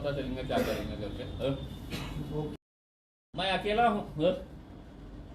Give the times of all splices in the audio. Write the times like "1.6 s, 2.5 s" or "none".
2.9 s